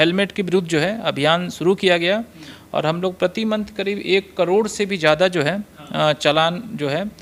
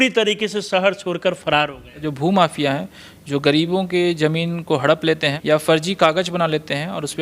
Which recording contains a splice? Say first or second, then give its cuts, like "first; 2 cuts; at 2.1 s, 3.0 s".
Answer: second; 2 cuts; at 2.0 s, 5.4 s